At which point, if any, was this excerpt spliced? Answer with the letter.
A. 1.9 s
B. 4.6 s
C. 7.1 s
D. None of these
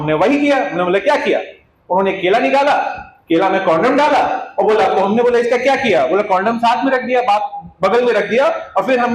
D